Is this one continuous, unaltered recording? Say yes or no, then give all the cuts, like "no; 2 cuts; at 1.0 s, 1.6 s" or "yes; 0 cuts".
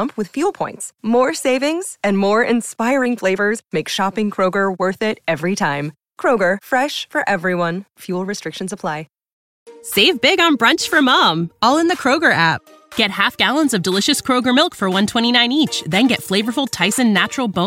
no; 1 cut; at 9.2 s